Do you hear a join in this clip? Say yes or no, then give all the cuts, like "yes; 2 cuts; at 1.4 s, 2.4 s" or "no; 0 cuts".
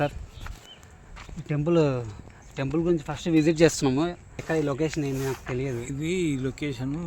yes; 1 cut; at 4.4 s